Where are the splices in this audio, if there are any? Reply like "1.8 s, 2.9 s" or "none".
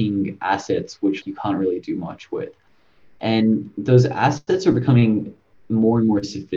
1.2 s